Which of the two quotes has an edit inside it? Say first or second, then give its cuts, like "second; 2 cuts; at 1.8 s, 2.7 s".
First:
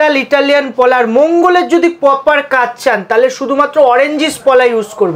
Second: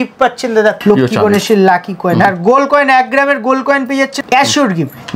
second; 3 cuts; at 0.8 s, 2.2 s, 4.2 s